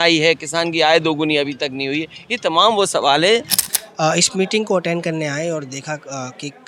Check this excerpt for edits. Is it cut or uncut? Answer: cut